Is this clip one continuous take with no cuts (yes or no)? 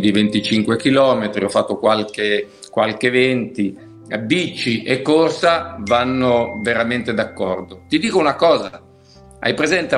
no